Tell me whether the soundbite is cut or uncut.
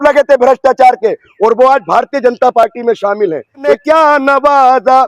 cut